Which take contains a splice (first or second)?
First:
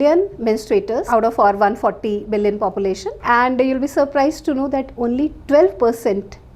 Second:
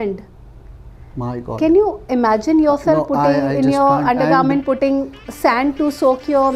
first